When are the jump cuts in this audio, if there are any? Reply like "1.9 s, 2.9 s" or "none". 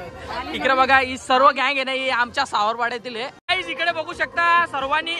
3.4 s